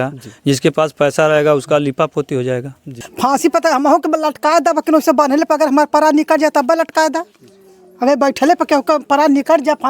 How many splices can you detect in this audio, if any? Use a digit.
1